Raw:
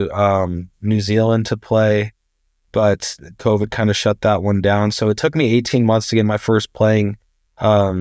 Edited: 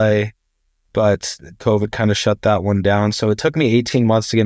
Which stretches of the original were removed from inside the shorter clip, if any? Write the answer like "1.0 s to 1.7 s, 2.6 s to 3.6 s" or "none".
none